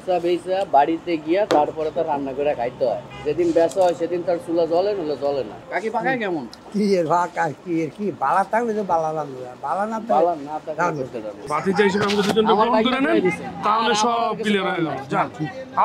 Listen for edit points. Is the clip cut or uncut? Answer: cut